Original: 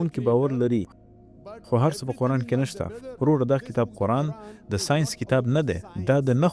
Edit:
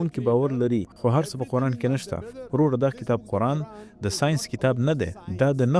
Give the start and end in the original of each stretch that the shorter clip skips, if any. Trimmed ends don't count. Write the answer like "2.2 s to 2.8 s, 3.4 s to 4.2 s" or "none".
0.9 s to 1.6 s

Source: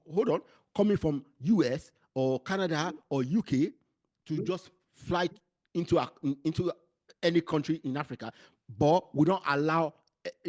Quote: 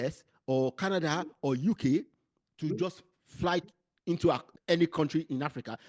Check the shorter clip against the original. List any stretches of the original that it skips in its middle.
6.1 s to 7.0 s

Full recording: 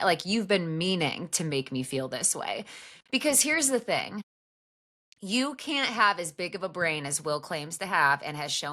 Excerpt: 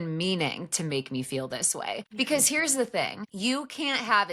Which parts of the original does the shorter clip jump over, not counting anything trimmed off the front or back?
2.7 s to 3.0 s, 4.2 s to 5.1 s

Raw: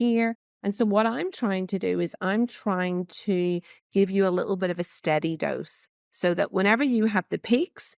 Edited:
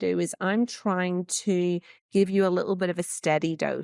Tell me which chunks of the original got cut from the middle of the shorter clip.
none

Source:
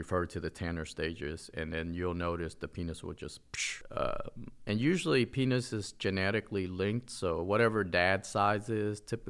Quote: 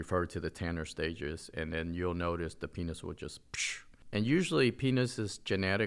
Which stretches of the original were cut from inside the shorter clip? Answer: 3.8 s to 4.4 s

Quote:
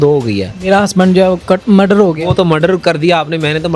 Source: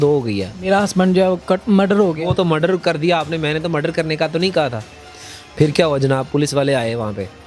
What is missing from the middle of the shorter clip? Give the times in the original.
none

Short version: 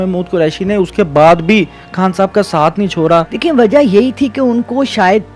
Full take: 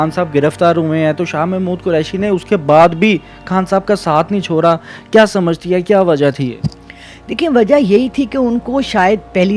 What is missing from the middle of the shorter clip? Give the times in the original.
4.9 s to 7.3 s

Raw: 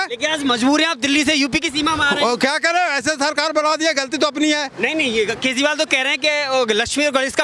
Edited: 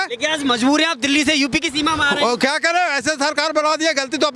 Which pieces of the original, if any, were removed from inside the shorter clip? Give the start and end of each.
none

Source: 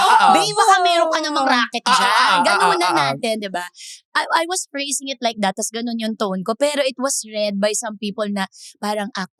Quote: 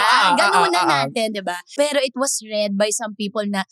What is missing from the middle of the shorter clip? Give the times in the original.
3.8 s to 6.6 s

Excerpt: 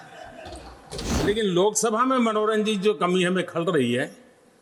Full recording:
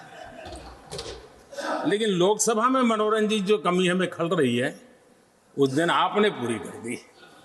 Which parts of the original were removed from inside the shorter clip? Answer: 1.2 s to 1.8 s

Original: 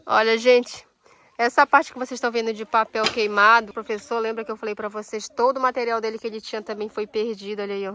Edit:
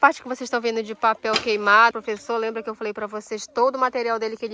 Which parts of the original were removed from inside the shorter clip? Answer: 3.7 s to 3.8 s

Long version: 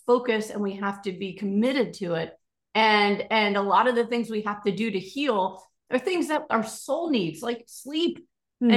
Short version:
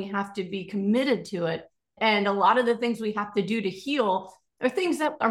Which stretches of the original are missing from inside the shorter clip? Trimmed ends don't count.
2.6 s to 3.2 s

